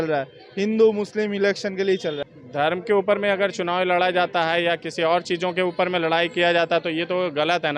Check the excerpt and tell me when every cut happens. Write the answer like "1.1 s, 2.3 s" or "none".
2.2 s